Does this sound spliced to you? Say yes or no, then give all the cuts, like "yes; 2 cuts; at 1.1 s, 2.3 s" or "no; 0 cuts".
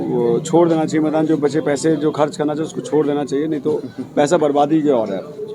no; 0 cuts